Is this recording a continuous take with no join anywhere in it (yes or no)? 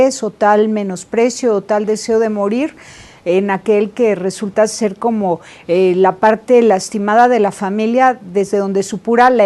no